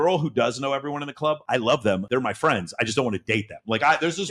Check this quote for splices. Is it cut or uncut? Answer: uncut